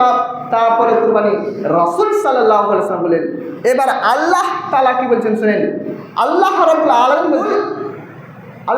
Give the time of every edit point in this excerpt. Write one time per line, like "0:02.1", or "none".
0:07.4